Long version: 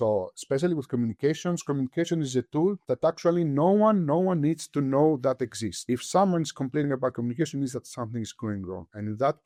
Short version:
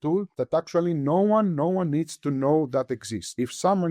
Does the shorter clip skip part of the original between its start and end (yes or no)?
no